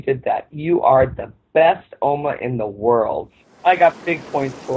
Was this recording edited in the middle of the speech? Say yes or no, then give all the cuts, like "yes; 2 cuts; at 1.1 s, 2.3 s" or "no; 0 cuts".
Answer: yes; 1 cut; at 3.4 s